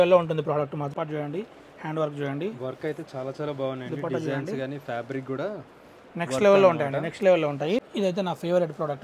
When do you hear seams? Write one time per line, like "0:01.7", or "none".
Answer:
0:00.9
0:07.8